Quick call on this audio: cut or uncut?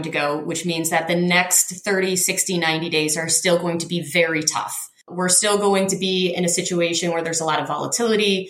cut